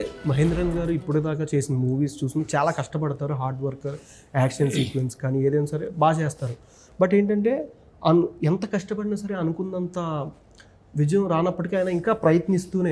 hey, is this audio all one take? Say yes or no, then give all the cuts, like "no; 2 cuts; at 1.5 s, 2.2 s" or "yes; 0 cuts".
yes; 0 cuts